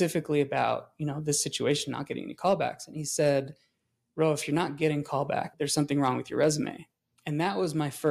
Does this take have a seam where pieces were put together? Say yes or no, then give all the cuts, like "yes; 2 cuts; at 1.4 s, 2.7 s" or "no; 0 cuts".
no; 0 cuts